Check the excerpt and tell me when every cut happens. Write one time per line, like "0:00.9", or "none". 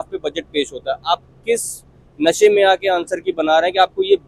none